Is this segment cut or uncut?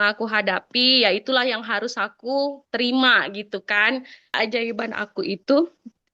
cut